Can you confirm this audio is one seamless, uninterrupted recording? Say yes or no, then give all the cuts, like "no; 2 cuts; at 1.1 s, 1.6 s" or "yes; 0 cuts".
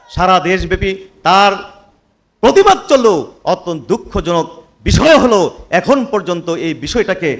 yes; 0 cuts